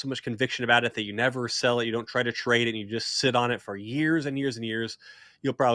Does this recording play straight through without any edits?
yes; 0 cuts

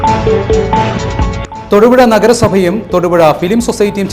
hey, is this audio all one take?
no; 1 cut; at 1.1 s

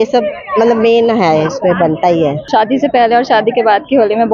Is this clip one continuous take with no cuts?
no; 1 cut; at 2.4 s

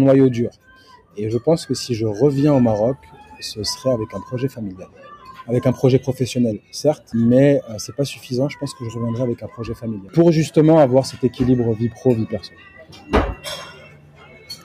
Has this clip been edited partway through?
yes; 2 cuts; at 7.0 s, 10.1 s

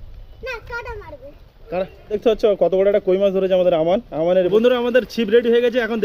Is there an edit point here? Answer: yes; 2 cuts; at 2.2 s, 4.5 s

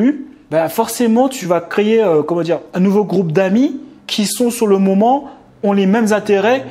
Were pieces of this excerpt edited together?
yes; 2 cuts; at 1.4 s, 2.7 s

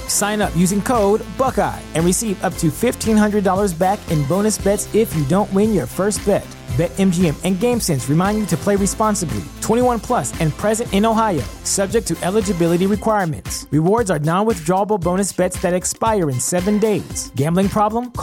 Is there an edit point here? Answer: no; 0 cuts

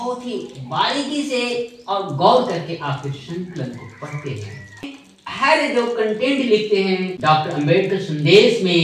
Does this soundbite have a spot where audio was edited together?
yes; 2 cuts; at 5.0 s, 7.1 s

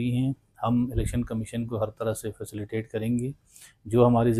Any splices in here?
no; 0 cuts

